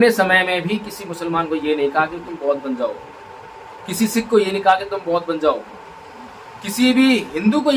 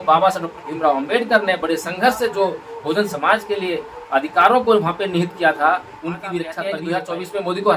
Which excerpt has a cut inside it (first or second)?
second